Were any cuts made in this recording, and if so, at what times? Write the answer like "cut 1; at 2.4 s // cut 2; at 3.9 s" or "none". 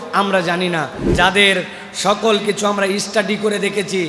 cut 1; at 1.0 s